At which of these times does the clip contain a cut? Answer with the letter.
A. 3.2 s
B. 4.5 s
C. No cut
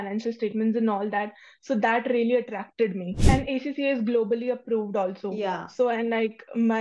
A